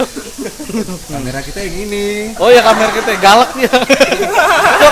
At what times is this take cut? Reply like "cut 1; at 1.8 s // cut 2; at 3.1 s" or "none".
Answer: cut 1; at 1.0 s